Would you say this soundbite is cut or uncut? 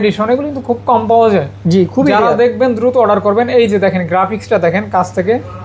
uncut